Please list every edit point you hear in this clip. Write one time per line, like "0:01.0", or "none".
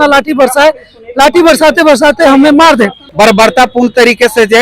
0:03.0